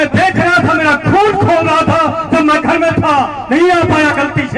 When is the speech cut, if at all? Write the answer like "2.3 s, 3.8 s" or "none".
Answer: none

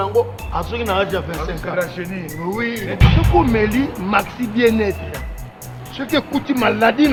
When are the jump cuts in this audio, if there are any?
none

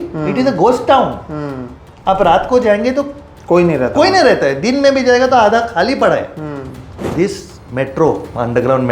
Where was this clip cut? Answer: 7.0 s

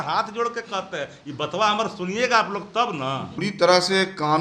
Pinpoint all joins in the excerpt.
3.4 s

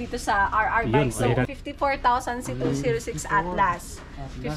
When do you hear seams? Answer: 1.5 s

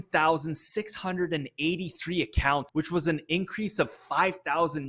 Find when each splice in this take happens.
2.7 s

